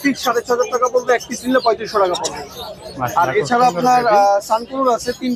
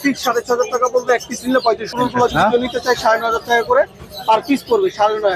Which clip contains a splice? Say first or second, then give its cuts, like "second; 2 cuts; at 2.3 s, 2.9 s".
second; 1 cut; at 1.9 s